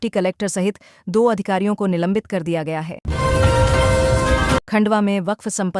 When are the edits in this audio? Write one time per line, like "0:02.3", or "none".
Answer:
none